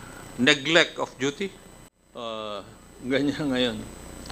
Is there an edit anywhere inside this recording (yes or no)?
yes